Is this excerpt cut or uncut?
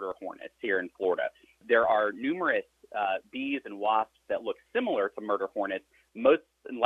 cut